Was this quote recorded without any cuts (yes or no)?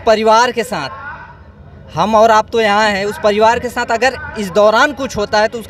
yes